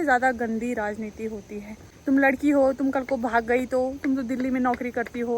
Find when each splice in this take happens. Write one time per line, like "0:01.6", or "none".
0:01.8